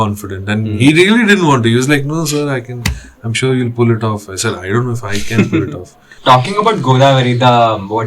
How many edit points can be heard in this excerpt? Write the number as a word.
one